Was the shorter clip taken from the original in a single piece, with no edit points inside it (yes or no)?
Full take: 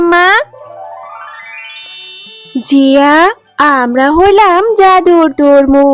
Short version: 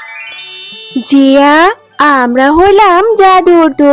no